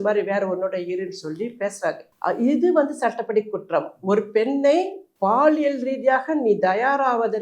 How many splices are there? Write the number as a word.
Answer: two